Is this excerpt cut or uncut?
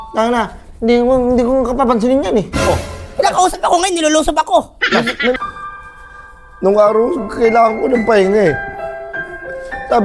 cut